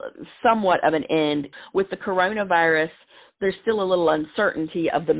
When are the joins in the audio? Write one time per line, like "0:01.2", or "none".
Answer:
0:01.4